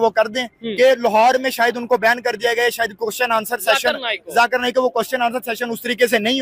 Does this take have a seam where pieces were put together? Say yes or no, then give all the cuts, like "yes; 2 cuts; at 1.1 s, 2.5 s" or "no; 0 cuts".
no; 0 cuts